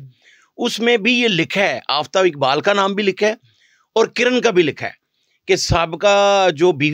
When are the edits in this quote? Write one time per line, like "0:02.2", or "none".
none